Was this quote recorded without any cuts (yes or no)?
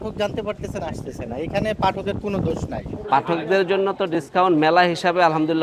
no